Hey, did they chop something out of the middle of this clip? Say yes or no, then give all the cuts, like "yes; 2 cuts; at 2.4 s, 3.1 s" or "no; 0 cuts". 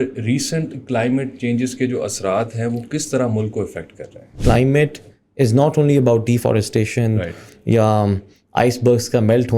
yes; 1 cut; at 4.4 s